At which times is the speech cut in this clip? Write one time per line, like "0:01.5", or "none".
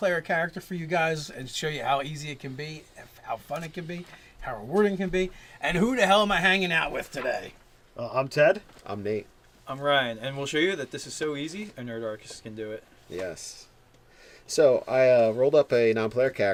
none